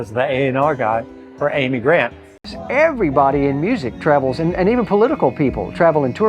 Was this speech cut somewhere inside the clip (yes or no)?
yes